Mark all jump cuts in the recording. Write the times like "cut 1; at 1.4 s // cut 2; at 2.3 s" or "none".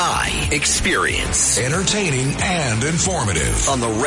none